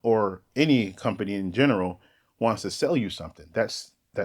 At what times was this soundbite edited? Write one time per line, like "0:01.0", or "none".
none